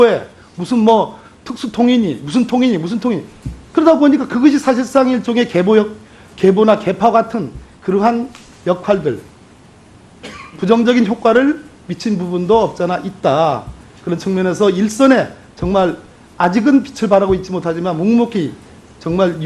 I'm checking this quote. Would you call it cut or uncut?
cut